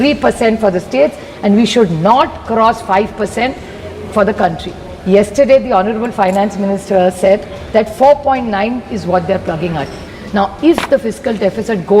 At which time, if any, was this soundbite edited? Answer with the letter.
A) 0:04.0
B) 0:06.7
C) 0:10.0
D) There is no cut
C